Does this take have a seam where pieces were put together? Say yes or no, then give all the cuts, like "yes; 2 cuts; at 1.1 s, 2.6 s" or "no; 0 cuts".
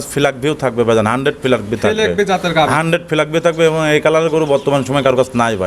no; 0 cuts